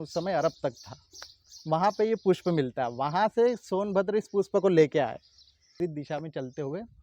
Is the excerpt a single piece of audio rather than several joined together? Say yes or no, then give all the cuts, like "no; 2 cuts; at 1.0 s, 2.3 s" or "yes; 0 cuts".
no; 1 cut; at 5.7 s